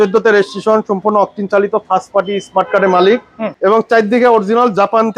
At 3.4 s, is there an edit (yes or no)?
yes